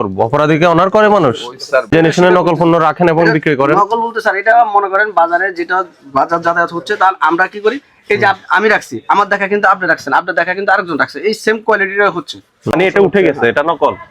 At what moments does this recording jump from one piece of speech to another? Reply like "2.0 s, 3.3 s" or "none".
1.9 s, 12.7 s